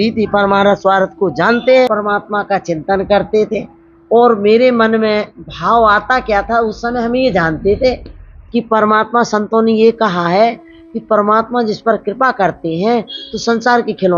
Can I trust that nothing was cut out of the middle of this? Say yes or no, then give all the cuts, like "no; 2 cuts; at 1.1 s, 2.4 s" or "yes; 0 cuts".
no; 1 cut; at 1.9 s